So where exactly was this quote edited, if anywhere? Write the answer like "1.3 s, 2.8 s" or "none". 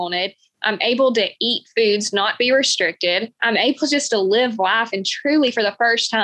none

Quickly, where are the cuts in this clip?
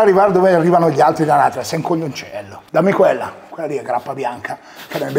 2.5 s

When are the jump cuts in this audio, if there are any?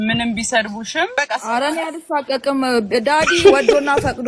1.1 s

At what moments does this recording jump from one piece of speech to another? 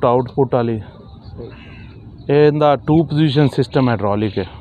none

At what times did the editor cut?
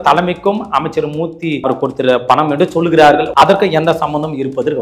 1.6 s, 3.3 s

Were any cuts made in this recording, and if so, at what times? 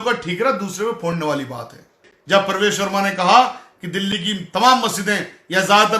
2.1 s

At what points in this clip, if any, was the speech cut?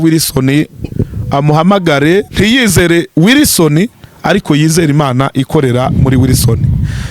2.3 s

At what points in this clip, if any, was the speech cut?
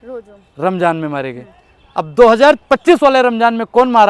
none

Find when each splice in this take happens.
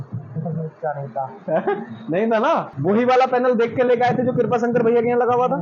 2.7 s

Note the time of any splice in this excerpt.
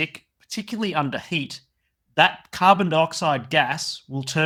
none

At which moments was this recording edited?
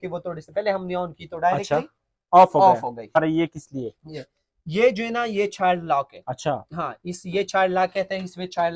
3.2 s

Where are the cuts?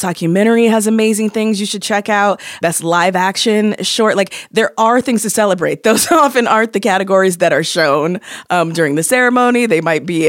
2.6 s

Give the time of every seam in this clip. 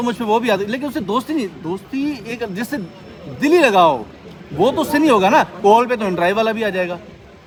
none

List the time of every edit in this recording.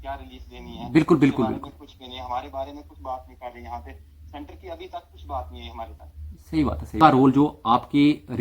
7.0 s

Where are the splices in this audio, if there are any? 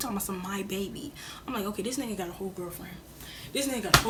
none

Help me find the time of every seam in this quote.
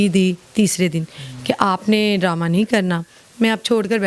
none

